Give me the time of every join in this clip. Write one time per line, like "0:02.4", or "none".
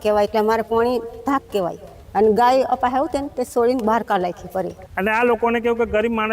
0:04.8